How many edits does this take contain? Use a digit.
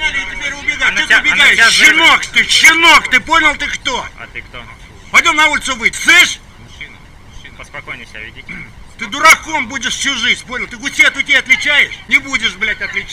2